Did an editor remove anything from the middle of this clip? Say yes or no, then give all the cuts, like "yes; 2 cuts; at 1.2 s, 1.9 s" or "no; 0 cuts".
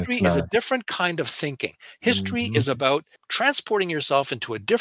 yes; 1 cut; at 3.2 s